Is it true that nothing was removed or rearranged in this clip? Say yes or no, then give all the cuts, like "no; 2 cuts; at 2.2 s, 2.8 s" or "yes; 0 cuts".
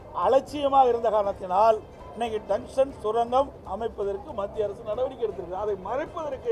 no; 1 cut; at 2.0 s